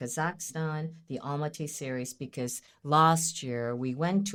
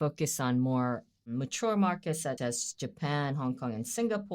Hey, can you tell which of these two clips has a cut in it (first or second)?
second